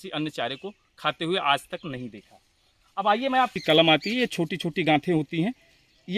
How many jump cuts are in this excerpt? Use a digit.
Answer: 1